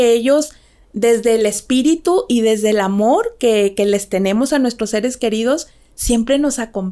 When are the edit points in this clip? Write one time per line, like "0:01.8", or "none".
none